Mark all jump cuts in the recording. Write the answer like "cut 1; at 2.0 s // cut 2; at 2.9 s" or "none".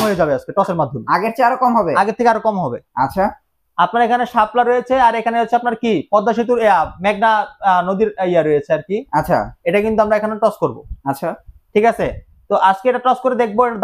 none